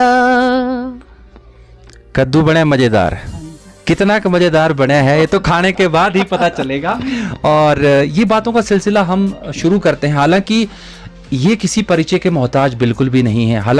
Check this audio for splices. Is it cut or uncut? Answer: uncut